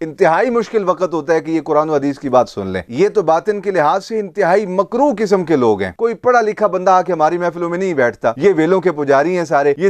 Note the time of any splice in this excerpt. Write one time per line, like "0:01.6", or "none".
0:05.9
0:08.3